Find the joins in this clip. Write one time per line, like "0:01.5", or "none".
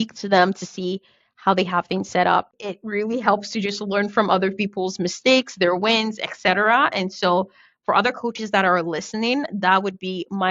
0:02.5